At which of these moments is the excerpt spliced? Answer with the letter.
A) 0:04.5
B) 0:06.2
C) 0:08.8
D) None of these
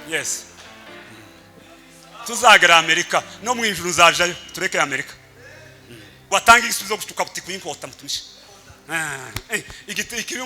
B